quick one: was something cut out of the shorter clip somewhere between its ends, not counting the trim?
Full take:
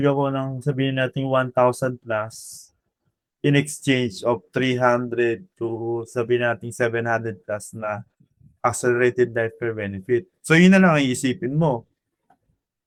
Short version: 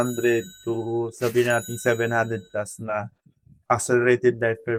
no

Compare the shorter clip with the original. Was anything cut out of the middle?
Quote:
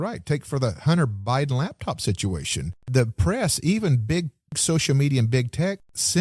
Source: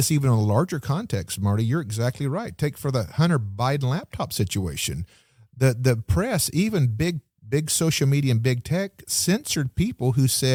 yes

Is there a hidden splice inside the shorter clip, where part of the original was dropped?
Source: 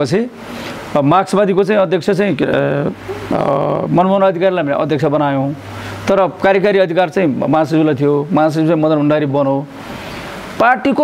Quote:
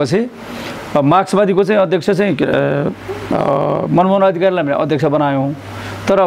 no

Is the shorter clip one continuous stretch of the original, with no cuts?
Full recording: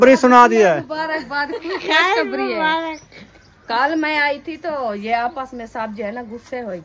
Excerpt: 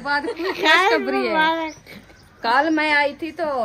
yes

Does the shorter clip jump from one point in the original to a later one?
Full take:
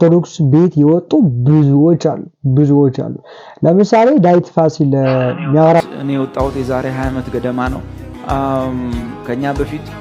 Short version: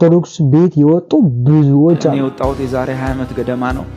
yes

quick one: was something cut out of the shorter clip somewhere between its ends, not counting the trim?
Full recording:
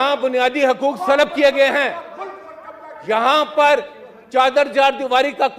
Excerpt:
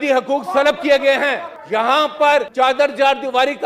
yes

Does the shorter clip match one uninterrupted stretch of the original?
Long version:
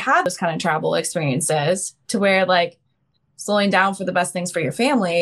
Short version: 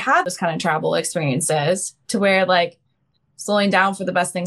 yes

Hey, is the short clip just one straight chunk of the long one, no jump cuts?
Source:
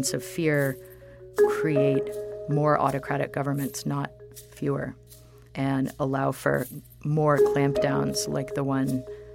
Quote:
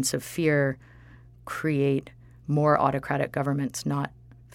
yes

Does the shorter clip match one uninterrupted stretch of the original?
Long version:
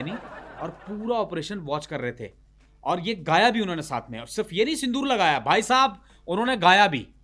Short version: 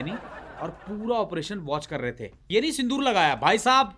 no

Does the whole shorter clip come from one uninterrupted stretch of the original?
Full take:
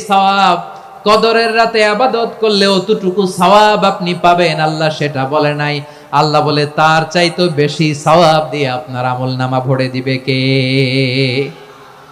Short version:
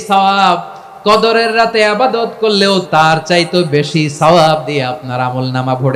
no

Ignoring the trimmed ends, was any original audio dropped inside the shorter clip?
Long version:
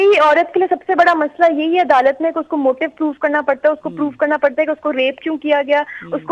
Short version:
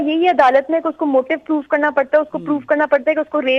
no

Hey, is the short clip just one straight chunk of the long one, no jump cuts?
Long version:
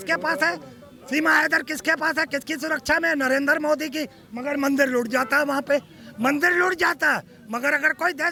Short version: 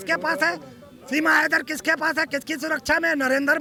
yes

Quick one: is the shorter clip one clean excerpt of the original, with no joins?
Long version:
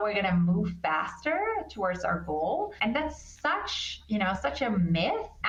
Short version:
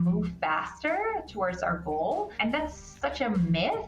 no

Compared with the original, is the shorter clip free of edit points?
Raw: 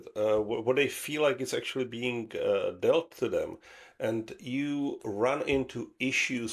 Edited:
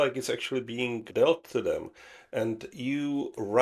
no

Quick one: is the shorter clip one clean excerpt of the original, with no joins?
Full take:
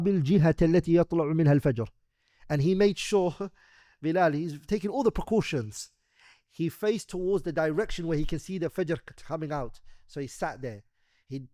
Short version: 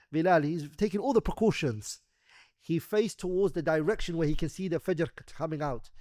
yes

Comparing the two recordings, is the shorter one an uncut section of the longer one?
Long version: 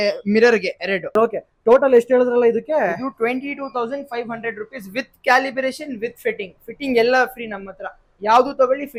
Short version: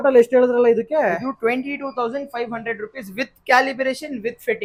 yes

